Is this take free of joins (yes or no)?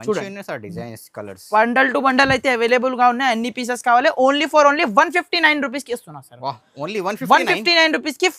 yes